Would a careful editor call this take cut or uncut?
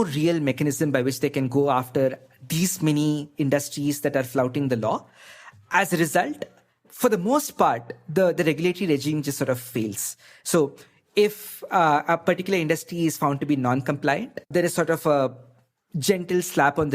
cut